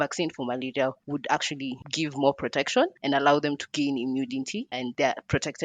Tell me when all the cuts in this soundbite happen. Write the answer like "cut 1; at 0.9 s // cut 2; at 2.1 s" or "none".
cut 1; at 1.0 s // cut 2; at 1.8 s // cut 3; at 3.7 s // cut 4; at 4.8 s